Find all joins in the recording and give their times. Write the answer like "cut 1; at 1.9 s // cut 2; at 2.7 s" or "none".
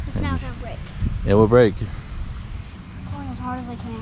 cut 1; at 2.8 s